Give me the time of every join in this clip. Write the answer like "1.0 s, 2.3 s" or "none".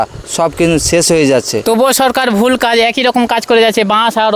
1.5 s